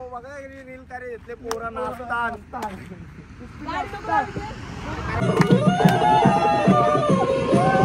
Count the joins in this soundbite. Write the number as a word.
one